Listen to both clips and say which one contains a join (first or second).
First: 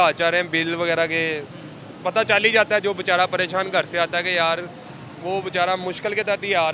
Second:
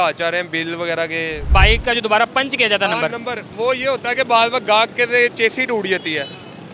second